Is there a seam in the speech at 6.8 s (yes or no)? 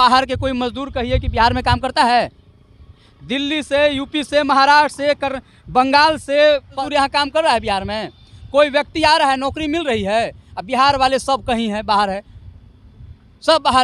yes